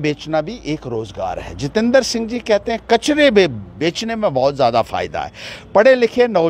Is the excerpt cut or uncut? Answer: uncut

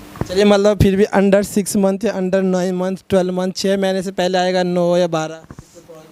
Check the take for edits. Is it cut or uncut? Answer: uncut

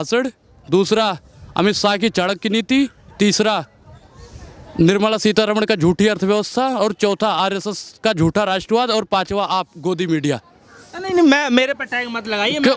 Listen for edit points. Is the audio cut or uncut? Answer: uncut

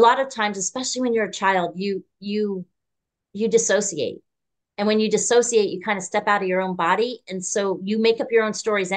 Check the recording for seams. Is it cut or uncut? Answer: uncut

